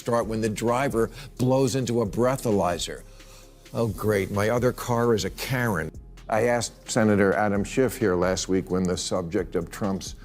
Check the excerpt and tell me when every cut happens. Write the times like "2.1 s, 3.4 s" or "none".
5.8 s